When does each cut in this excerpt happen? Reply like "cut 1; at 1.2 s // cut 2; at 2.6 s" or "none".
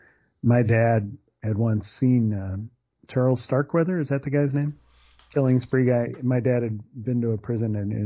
cut 1; at 5.2 s